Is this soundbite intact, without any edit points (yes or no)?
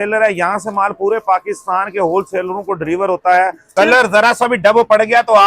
no